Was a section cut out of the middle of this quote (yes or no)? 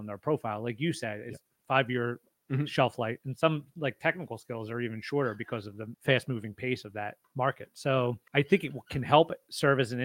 yes